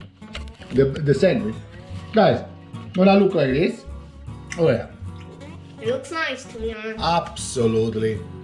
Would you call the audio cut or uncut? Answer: uncut